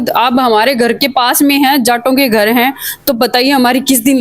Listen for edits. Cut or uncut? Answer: uncut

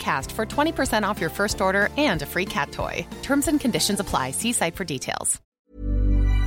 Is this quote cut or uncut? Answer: cut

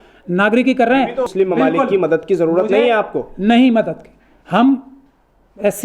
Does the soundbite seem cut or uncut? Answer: cut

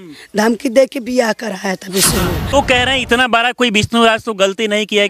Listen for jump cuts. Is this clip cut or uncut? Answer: cut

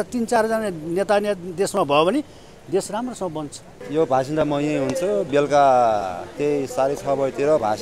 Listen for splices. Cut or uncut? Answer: cut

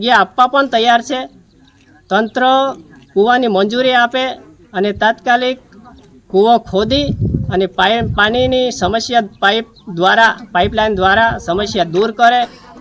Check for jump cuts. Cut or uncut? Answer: uncut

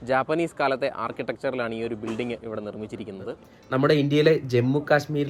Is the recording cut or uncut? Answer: cut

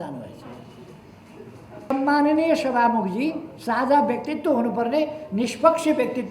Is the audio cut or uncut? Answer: cut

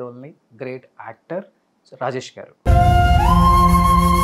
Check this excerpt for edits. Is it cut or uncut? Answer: uncut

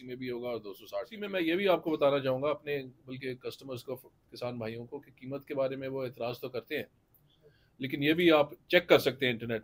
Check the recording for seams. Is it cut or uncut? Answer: cut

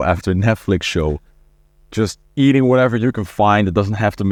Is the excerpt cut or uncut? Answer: uncut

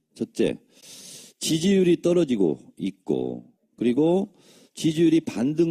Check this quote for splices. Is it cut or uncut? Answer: cut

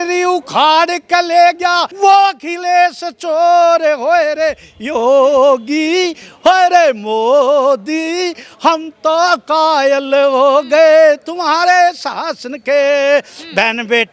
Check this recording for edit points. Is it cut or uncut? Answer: cut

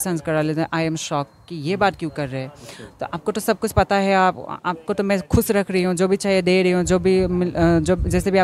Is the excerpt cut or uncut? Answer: uncut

